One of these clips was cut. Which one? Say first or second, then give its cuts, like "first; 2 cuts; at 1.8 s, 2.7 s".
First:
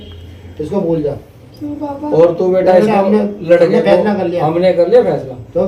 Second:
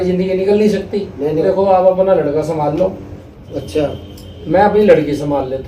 second; 1 cut; at 1.4 s